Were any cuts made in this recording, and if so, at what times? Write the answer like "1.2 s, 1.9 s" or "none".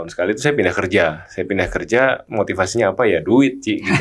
2.2 s